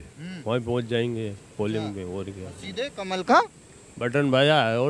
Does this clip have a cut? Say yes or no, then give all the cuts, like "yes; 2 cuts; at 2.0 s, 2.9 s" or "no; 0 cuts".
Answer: no; 0 cuts